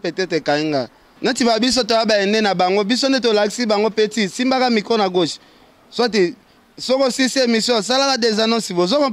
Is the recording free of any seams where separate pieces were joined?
no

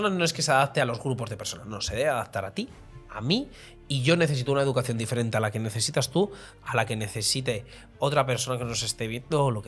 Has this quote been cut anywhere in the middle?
no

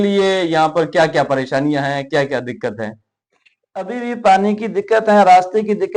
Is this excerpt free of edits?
yes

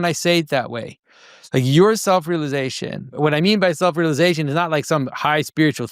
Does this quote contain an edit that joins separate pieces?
yes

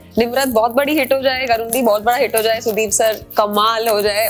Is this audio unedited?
yes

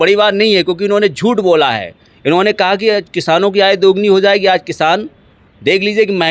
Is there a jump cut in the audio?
no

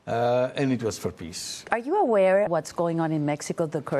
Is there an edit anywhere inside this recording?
yes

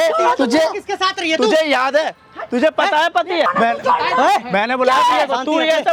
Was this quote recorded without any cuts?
yes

